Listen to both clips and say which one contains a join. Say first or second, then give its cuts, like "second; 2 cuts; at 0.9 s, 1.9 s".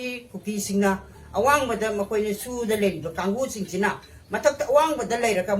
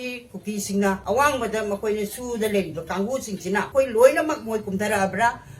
second; 2 cuts; at 1.0 s, 3.7 s